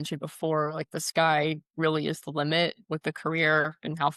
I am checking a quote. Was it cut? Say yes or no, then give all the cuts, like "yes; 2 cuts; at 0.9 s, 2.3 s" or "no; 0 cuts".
no; 0 cuts